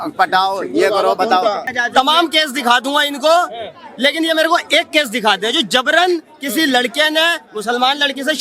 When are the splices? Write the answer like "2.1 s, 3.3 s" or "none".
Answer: 1.7 s